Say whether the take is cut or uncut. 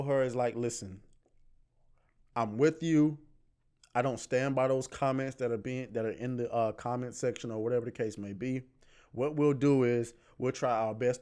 uncut